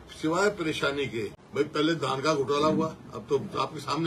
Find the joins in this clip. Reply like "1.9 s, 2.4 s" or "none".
1.8 s